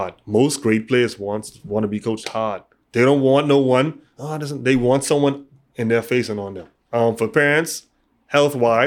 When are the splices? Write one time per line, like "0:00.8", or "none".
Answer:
0:06.7